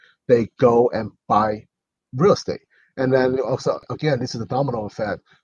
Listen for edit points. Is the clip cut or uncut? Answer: uncut